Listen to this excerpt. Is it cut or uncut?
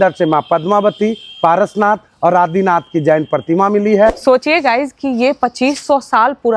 cut